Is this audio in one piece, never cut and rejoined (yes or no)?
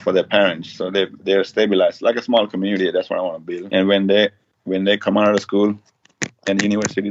no